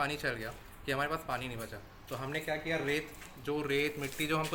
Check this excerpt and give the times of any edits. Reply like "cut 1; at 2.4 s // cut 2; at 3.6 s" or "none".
none